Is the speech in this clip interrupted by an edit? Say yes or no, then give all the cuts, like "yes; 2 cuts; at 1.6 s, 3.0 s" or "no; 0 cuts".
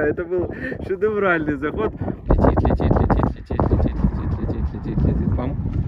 yes; 1 cut; at 2.3 s